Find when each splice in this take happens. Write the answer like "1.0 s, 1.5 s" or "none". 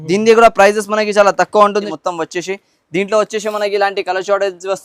1.7 s